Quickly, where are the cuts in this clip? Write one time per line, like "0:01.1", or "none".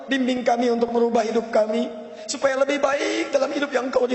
none